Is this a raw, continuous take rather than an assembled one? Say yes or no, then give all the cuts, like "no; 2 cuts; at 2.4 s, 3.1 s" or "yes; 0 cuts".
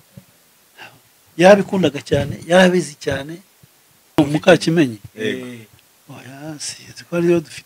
no; 1 cut; at 4.2 s